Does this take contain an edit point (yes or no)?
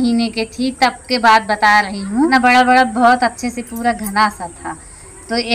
yes